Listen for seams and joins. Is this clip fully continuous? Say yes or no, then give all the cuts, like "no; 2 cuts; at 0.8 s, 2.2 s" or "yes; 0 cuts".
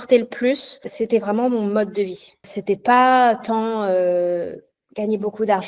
yes; 0 cuts